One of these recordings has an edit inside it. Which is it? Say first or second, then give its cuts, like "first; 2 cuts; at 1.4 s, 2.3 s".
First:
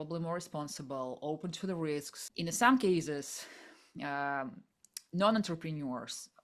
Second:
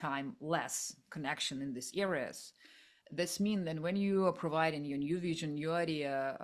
first; 1 cut; at 2.2 s